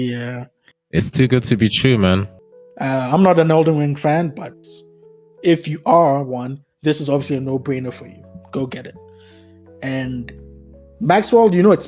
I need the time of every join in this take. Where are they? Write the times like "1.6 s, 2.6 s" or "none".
2.3 s

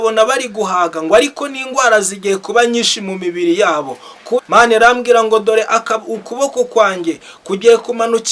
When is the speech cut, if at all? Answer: 4.4 s

